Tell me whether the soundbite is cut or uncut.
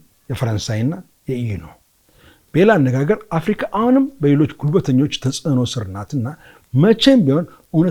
uncut